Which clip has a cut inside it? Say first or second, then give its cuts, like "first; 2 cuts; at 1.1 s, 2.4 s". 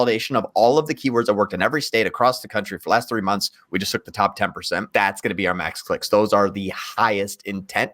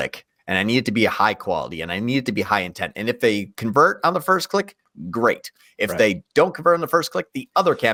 first; 1 cut; at 4.9 s